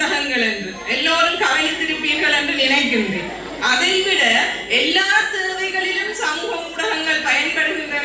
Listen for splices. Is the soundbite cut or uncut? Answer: uncut